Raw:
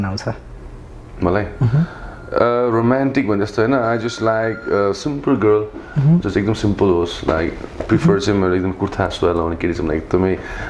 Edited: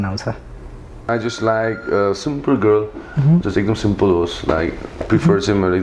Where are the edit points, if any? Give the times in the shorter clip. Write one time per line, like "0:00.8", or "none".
0:01.1